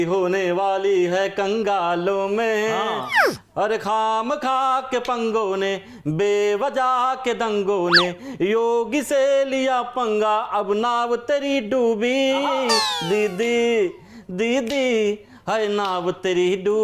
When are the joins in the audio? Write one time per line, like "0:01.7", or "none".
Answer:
none